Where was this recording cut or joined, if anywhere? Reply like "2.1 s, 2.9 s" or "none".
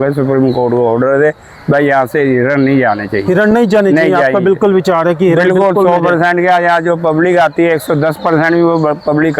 none